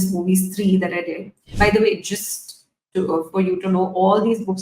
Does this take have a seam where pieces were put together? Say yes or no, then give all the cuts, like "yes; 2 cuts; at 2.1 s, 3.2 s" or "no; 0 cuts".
yes; 1 cut; at 1.4 s